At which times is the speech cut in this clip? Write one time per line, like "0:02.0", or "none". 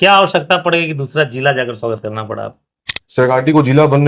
0:03.2